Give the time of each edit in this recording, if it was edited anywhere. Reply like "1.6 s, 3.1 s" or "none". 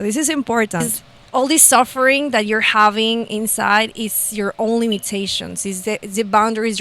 0.9 s